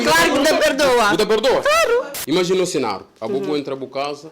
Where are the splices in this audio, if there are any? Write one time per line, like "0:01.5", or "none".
none